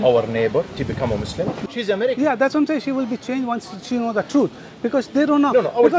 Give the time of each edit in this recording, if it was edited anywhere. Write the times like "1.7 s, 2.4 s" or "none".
1.6 s

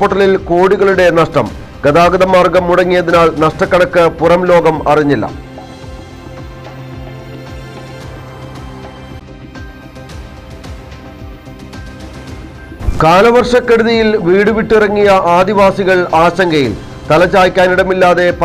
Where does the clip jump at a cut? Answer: 12.9 s

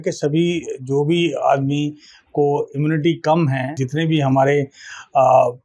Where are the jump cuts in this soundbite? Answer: 3.8 s

